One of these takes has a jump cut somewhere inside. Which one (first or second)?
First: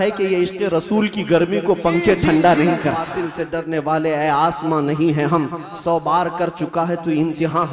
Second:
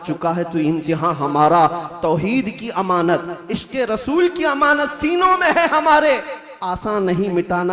first